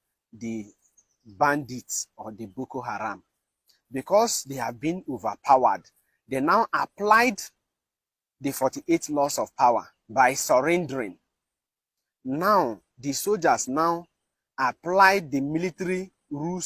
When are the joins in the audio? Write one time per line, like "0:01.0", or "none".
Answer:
none